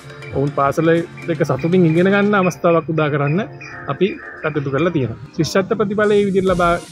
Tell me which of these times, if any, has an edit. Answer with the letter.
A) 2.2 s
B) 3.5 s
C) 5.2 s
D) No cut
C